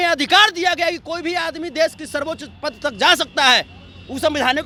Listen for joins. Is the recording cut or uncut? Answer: uncut